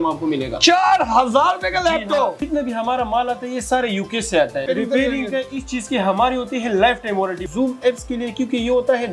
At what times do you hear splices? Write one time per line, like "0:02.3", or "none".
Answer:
0:02.4
0:04.6
0:07.5